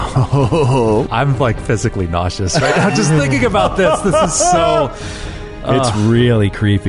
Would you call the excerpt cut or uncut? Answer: cut